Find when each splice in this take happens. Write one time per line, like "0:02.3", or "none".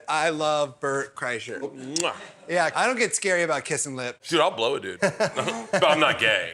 0:01.7
0:02.7
0:04.2